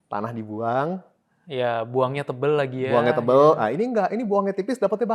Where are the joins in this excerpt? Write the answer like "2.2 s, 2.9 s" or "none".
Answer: none

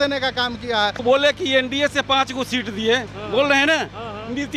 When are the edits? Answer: 1.0 s

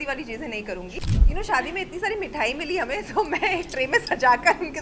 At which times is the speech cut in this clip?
1.0 s

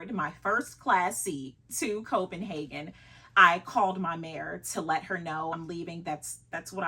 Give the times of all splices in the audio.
5.5 s

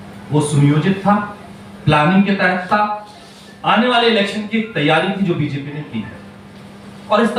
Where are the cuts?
none

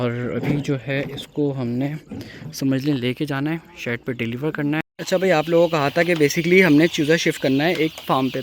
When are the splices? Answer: 4.8 s

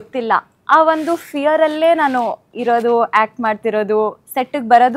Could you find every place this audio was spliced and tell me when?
none

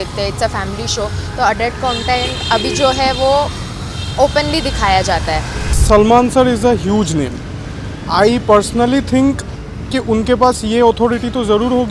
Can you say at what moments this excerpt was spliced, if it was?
5.7 s

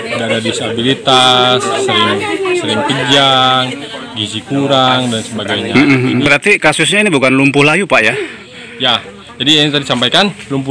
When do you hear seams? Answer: 6.2 s

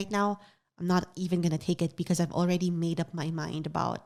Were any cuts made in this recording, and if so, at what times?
none

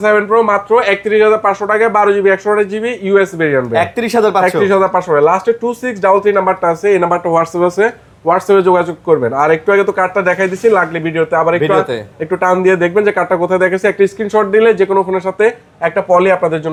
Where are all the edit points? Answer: none

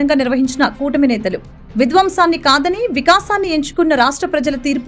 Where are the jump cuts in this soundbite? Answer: none

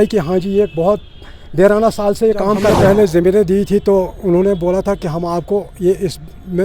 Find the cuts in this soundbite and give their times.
2.6 s

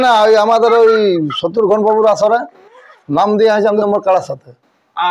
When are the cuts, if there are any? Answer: 3.8 s

